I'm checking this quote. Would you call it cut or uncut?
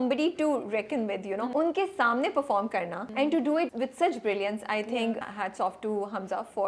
cut